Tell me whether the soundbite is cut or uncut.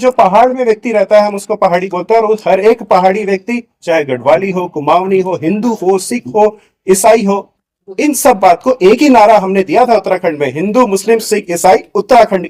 uncut